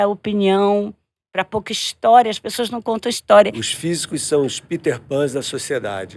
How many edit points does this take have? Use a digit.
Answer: 1